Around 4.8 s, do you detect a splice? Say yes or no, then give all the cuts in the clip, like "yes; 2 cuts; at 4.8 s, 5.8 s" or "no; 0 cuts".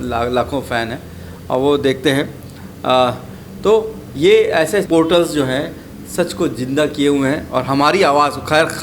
yes; 1 cut; at 4.8 s